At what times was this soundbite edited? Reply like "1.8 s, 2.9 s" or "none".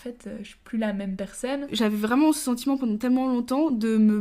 1.7 s